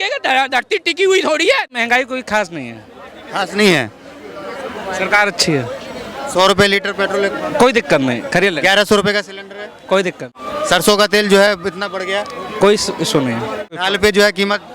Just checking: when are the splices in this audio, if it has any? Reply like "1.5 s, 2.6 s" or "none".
1.7 s, 10.4 s, 13.8 s